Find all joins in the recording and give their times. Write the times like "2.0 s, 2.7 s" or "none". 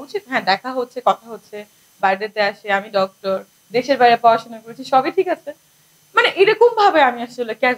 none